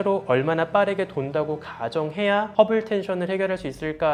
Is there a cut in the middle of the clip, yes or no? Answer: no